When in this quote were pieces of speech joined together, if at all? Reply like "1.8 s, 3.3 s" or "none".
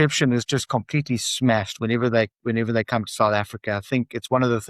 none